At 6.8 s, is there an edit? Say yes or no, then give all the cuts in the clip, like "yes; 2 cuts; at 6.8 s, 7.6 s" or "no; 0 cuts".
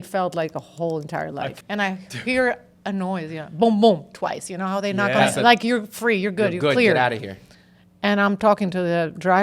no; 1 cut; at 1.5 s